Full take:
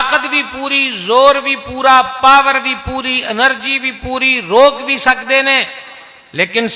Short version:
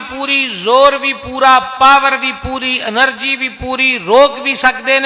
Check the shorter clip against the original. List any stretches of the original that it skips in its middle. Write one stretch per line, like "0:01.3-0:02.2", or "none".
none